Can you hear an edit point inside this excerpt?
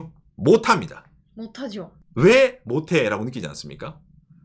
no; 0 cuts

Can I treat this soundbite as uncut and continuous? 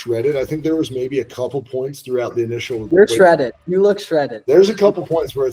yes; 0 cuts

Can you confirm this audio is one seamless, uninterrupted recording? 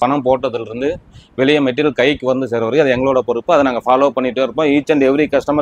yes; 0 cuts

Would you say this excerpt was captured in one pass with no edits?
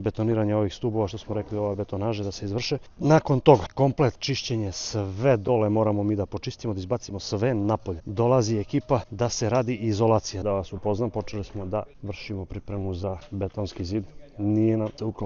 no; 1 cut; at 10.4 s

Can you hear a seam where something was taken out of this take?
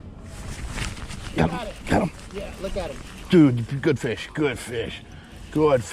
yes; 1 cut; at 3.2 s

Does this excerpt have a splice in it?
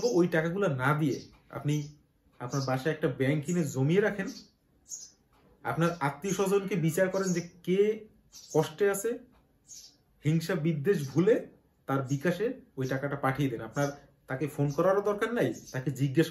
no; 0 cuts

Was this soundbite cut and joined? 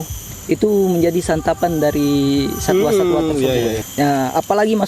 yes; 1 cut; at 3.8 s

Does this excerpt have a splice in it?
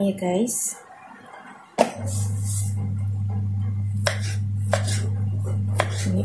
no; 0 cuts

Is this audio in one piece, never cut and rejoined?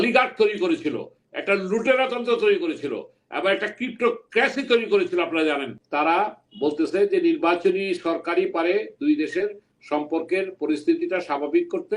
no; 1 cut; at 5.8 s

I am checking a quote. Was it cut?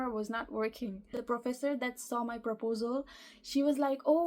yes; 1 cut; at 1.2 s

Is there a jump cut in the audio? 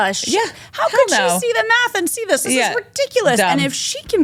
no; 0 cuts

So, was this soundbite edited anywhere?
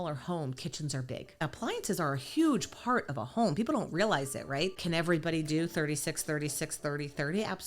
yes; 2 cuts; at 1.4 s, 4.8 s

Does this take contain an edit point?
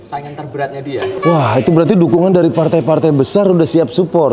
yes; 1 cut; at 1.1 s

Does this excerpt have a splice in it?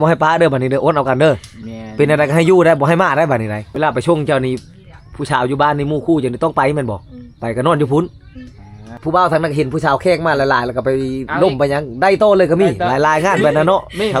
yes; 2 cuts; at 3.6 s, 9.0 s

